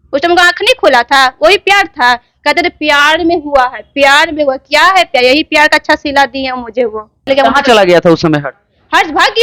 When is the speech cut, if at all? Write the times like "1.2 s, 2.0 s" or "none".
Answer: 7.3 s